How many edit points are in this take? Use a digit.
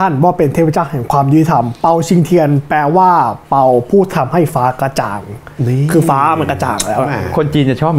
0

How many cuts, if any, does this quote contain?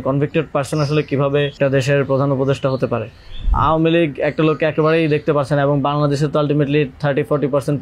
2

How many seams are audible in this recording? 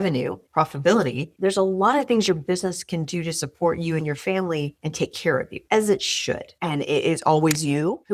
1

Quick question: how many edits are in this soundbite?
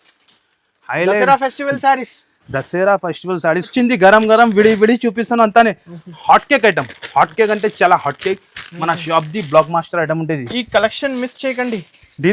1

